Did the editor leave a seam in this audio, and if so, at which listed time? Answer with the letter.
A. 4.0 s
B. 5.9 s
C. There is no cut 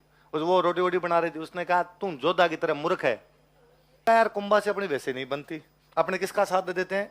A